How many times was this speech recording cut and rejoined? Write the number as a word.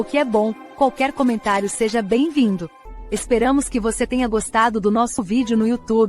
two